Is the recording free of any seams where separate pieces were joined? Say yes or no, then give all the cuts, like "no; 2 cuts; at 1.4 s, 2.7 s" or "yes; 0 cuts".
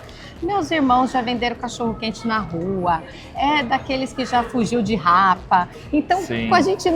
yes; 0 cuts